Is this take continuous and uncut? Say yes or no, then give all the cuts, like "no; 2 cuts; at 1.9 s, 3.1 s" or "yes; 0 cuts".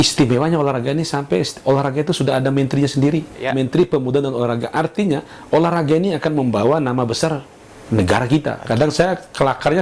no; 2 cuts; at 3.4 s, 8.6 s